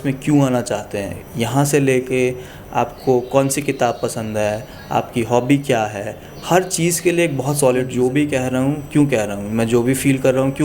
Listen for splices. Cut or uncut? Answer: cut